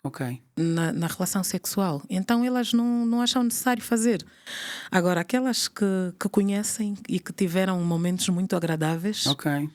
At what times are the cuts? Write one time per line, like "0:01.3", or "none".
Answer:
none